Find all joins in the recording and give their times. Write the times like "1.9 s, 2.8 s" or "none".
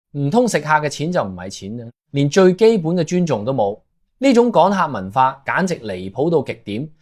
none

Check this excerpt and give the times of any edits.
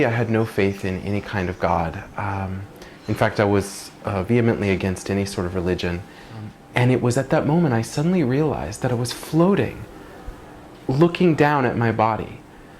6.6 s

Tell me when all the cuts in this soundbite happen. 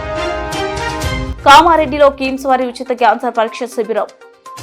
1.3 s

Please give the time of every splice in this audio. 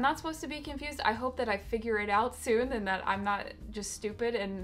none

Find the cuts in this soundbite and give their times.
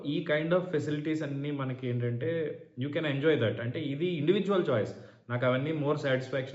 none

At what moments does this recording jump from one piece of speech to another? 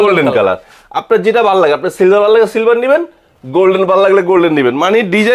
none

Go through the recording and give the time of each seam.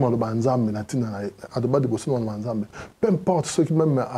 none

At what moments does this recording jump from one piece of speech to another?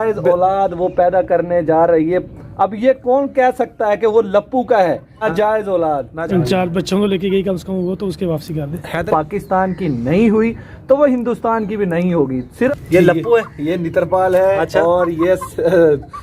5.1 s, 6.2 s, 9.1 s, 12.4 s

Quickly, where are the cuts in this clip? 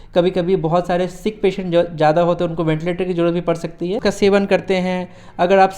4.0 s

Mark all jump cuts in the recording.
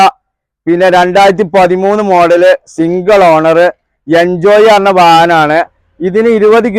none

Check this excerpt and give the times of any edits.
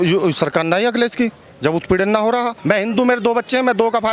2.6 s

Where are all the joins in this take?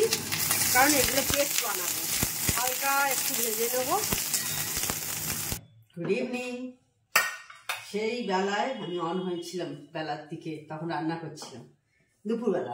5.6 s

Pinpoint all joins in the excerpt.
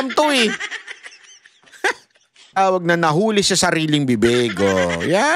2.6 s

